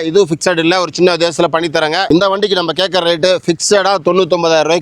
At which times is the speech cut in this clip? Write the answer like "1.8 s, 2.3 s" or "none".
2.1 s